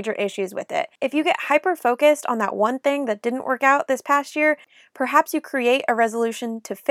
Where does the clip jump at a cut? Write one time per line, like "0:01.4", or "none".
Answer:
0:00.9

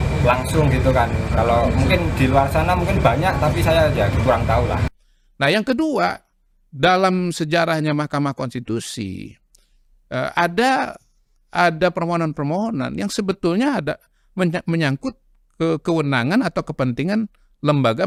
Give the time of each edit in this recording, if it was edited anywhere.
none

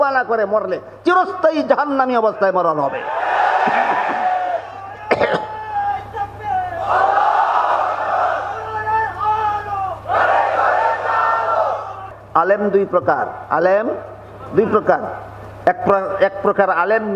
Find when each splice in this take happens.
0:12.1

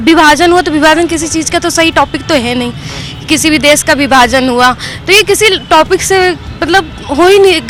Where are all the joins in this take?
none

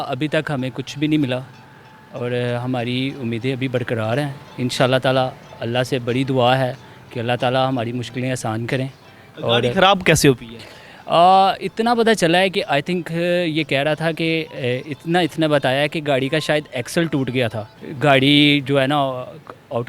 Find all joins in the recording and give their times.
none

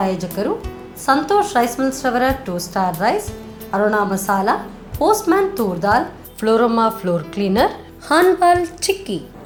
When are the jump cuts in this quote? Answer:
none

